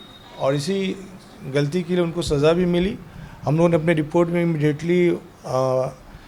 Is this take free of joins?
yes; 0 cuts

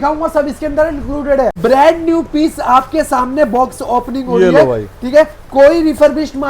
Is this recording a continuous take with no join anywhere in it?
no; 1 cut; at 1.6 s

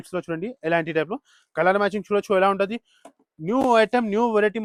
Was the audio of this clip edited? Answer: no; 0 cuts

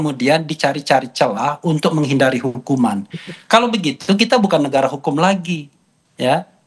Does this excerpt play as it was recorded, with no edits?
yes; 0 cuts

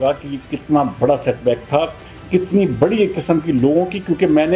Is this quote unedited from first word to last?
yes; 0 cuts

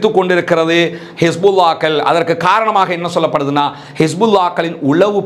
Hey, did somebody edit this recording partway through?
no; 0 cuts

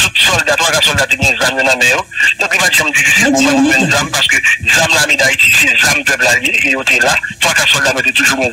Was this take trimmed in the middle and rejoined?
no; 0 cuts

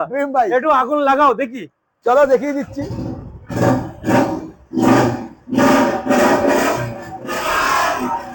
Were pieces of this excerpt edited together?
no; 0 cuts

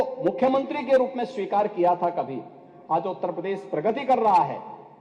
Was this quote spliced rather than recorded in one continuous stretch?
no; 0 cuts

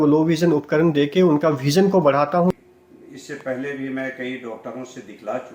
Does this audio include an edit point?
yes; 1 cut; at 2.6 s

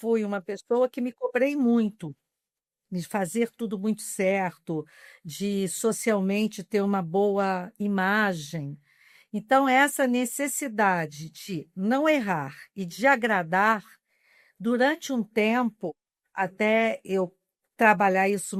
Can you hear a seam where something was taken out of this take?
no; 0 cuts

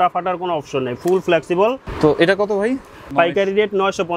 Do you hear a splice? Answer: yes; 2 cuts; at 1.9 s, 3.0 s

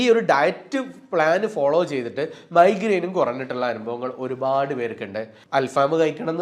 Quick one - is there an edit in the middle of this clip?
yes; 1 cut; at 5.4 s

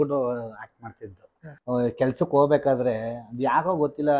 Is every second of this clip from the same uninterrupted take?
no; 1 cut; at 1.4 s

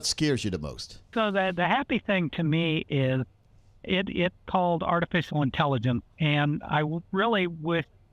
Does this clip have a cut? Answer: yes; 1 cut; at 1.9 s

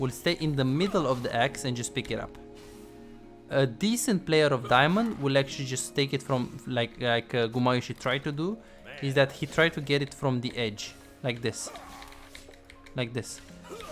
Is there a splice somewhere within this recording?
no; 0 cuts

